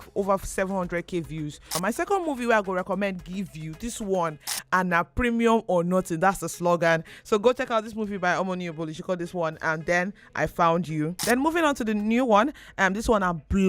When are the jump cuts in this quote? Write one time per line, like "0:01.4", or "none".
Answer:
0:01.8
0:04.5
0:11.2